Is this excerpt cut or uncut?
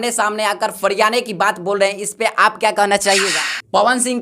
cut